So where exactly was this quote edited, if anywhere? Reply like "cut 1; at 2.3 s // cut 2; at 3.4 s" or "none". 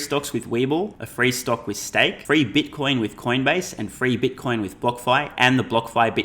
cut 1; at 1.0 s // cut 2; at 2.2 s